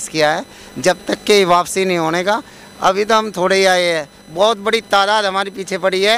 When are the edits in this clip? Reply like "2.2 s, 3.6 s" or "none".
none